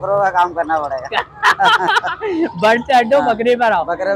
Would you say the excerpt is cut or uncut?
uncut